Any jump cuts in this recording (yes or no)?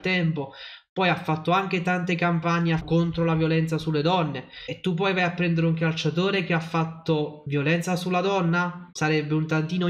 yes